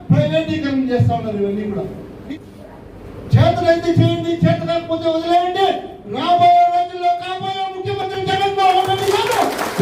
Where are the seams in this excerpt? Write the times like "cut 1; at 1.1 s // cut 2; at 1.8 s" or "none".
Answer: cut 1; at 2.1 s